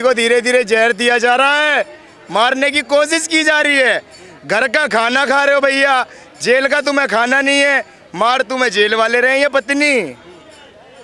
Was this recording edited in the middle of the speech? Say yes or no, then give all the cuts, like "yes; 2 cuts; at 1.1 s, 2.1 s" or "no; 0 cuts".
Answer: no; 0 cuts